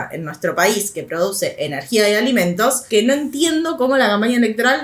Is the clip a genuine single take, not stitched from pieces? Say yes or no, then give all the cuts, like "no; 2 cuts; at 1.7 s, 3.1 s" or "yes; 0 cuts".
no; 1 cut; at 2.8 s